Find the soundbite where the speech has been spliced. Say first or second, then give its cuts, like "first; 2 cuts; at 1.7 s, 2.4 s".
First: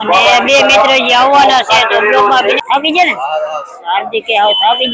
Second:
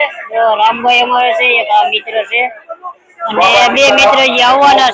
first; 1 cut; at 2.6 s